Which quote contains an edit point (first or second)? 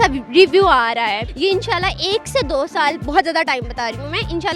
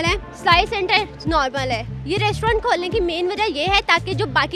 first